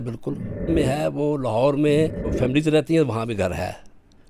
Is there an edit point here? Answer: yes; 2 cuts; at 0.7 s, 2.3 s

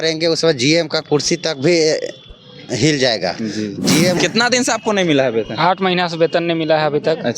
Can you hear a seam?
yes; 1 cut; at 4.2 s

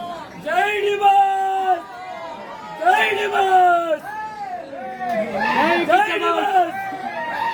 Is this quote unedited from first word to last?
yes; 0 cuts

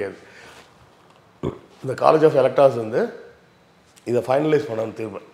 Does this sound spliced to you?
no; 0 cuts

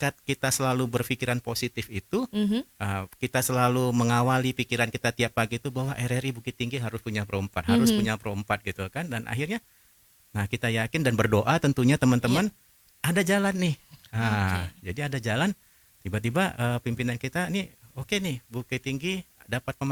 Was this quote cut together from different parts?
no; 0 cuts

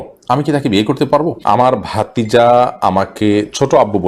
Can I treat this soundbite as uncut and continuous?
no; 1 cut; at 1.4 s

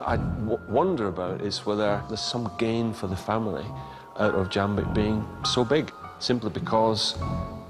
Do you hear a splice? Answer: yes; 2 cuts; at 2.1 s, 6.0 s

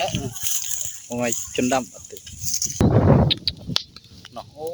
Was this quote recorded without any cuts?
no; 1 cut; at 2.8 s

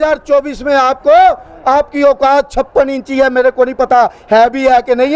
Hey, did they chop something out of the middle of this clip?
no; 0 cuts

